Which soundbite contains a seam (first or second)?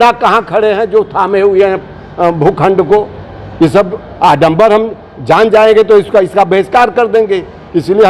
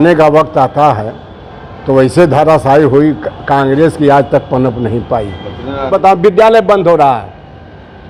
second